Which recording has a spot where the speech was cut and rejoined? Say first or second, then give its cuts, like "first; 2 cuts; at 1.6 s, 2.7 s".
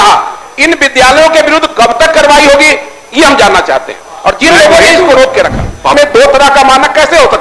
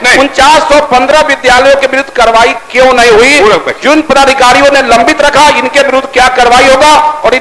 first; 1 cut; at 5.9 s